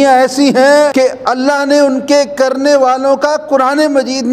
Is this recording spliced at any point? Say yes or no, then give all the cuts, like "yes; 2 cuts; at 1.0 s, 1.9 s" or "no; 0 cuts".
yes; 1 cut; at 0.9 s